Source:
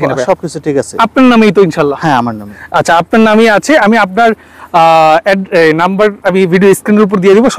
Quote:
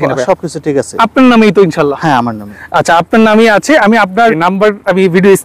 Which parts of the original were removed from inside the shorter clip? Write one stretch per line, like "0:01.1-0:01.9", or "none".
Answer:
0:04.4-0:05.8